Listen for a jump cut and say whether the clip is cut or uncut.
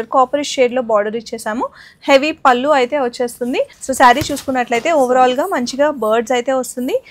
cut